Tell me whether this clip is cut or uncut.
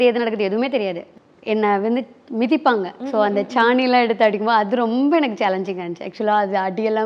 cut